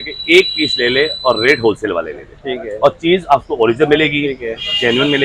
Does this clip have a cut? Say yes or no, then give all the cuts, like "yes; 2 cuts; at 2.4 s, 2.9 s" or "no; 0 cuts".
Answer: no; 0 cuts